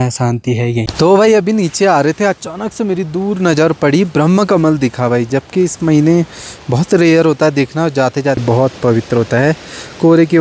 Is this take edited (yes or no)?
yes